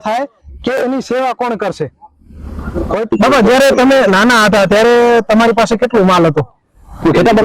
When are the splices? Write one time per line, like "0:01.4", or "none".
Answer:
0:03.1